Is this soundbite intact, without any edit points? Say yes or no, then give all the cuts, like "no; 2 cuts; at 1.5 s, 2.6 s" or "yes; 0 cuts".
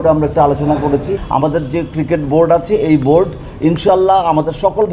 no; 1 cut; at 1.2 s